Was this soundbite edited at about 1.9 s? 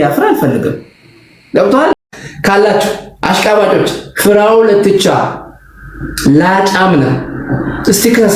yes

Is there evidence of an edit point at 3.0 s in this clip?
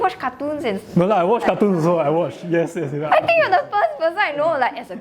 yes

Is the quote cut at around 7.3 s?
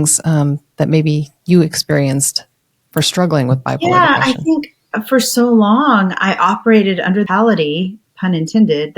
yes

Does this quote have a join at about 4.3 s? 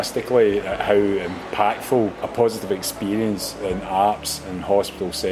no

